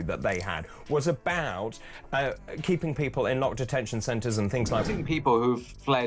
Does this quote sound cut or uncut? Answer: cut